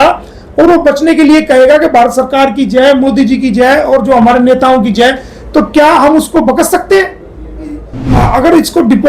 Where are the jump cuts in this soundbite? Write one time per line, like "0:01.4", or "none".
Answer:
0:08.0